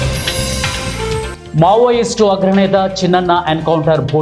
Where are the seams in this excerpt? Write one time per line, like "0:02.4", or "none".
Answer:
0:01.4

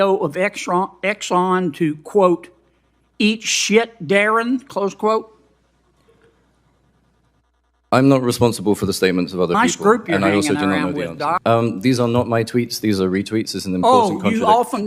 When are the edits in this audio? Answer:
0:11.4

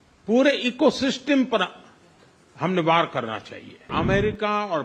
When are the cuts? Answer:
0:03.9

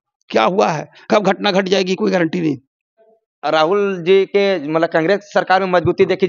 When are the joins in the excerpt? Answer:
0:03.0

